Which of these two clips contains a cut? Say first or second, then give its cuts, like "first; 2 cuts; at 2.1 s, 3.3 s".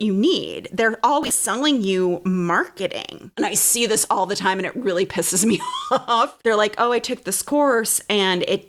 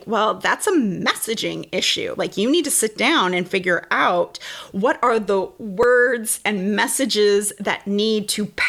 first; 2 cuts; at 3.3 s, 6.4 s